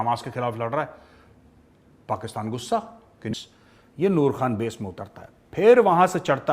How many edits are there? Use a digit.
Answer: 1